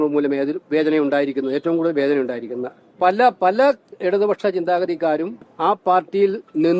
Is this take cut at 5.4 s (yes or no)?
yes